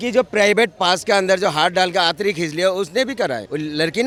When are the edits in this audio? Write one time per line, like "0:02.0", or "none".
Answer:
none